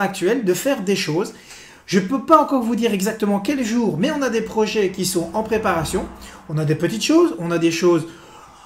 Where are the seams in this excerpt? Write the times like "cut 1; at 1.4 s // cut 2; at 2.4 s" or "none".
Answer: cut 1; at 2.2 s